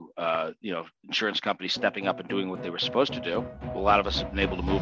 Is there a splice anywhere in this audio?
yes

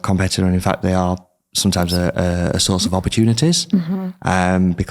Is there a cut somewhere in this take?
no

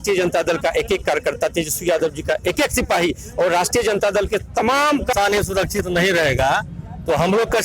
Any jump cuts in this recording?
yes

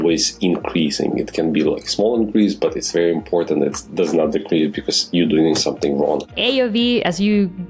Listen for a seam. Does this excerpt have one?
yes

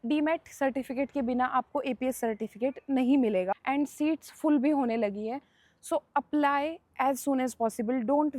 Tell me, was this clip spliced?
yes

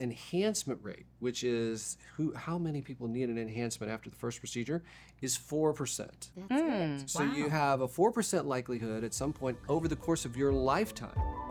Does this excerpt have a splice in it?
no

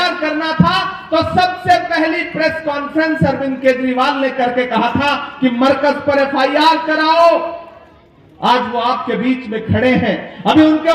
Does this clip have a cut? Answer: no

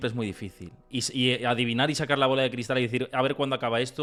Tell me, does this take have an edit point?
no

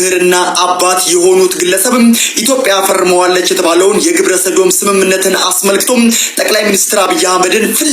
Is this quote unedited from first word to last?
yes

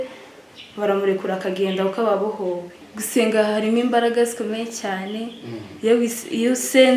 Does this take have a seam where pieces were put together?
yes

